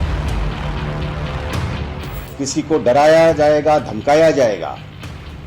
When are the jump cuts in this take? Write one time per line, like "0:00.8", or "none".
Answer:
0:01.8